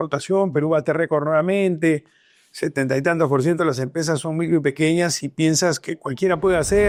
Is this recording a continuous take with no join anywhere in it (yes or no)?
yes